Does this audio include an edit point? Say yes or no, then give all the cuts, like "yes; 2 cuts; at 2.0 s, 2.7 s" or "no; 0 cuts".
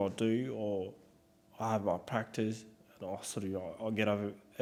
no; 0 cuts